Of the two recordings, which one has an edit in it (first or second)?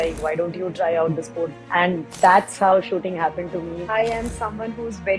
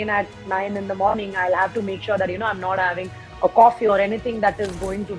first